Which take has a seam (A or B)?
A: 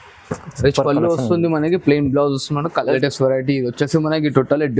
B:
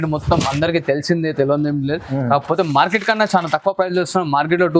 A